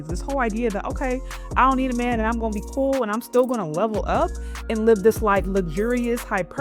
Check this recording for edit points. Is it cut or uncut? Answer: uncut